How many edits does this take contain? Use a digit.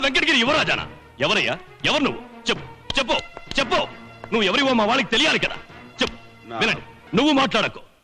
1